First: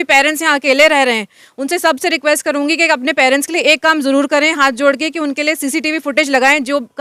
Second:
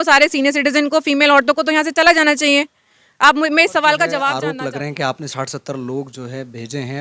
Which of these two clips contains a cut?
second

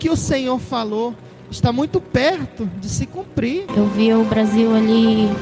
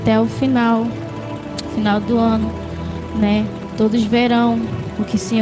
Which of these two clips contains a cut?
first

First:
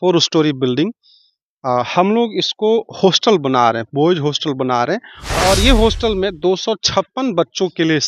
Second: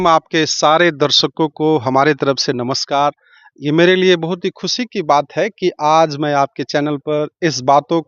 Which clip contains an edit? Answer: first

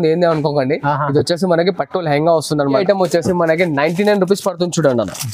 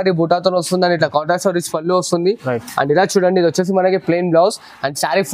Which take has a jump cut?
first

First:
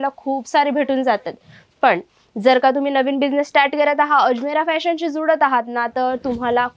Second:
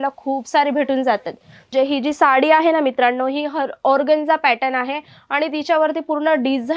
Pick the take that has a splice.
second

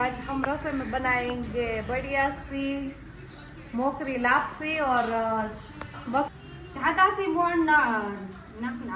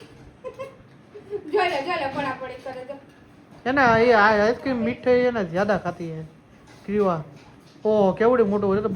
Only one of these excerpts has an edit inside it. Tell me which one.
first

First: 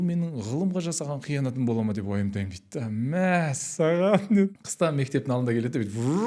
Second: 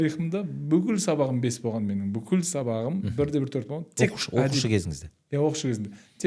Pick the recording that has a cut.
first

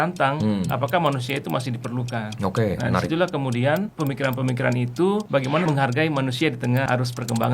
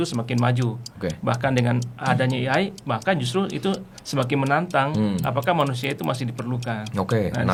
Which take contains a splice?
first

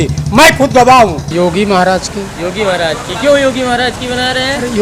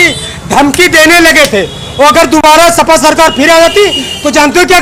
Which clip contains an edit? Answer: first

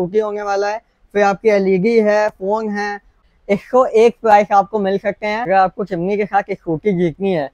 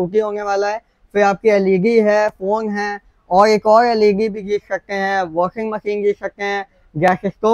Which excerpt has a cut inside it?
first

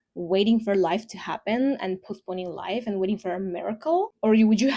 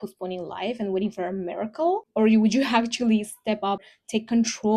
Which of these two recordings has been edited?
second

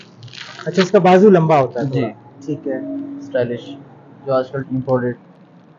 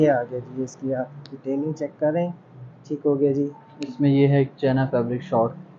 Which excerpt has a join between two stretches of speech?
first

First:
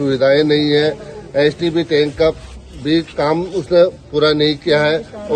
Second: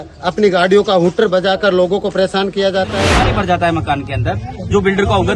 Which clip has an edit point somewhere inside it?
second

